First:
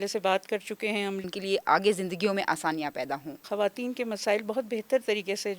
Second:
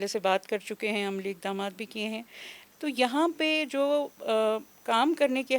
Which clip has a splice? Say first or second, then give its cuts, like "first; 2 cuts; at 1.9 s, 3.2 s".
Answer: first; 2 cuts; at 1.3 s, 3.4 s